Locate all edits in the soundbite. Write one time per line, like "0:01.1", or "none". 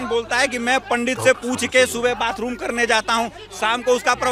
none